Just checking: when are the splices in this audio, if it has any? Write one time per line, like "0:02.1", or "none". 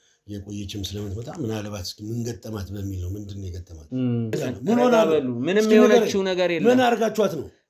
0:04.4